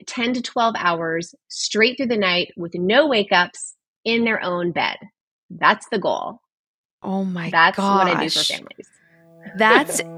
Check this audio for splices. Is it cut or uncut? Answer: uncut